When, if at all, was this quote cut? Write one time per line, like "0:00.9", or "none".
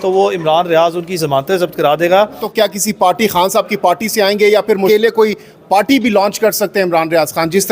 0:02.4
0:05.4